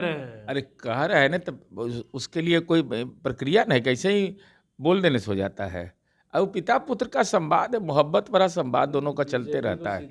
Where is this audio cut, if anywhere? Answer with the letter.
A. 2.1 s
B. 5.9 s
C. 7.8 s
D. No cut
D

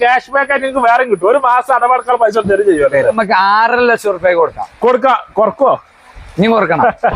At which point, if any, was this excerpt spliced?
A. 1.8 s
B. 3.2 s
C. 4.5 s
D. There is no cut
B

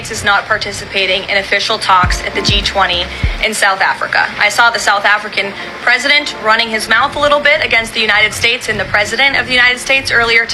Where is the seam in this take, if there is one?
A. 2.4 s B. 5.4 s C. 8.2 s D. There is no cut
D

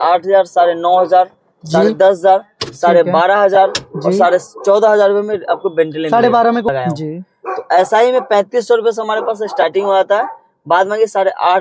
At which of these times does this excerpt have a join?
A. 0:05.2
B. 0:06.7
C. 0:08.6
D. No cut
B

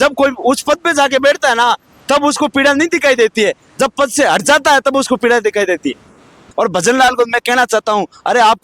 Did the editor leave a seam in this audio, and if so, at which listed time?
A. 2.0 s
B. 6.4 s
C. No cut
B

